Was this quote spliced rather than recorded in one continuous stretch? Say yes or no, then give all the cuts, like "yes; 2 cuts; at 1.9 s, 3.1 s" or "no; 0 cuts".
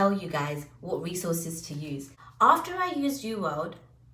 yes; 1 cut; at 2.2 s